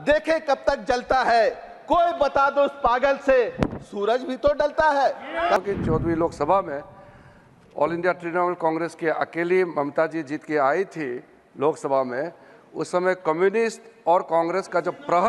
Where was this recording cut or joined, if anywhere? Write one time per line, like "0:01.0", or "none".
0:05.6